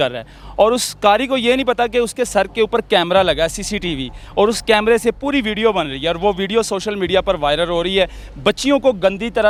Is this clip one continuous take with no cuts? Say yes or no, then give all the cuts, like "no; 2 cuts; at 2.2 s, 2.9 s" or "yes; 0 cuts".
yes; 0 cuts